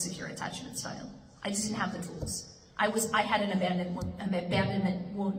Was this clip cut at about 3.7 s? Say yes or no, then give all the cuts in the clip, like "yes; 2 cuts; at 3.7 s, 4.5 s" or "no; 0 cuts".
no; 0 cuts